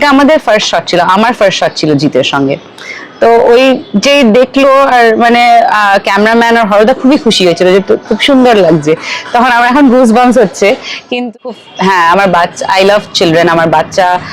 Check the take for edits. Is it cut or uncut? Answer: cut